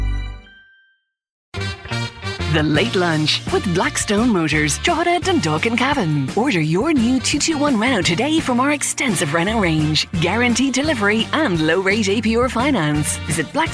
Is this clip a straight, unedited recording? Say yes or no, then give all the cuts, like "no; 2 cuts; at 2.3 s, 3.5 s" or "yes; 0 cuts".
no; 1 cut; at 1.6 s